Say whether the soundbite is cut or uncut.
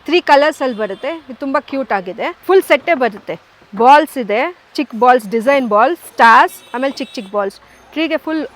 cut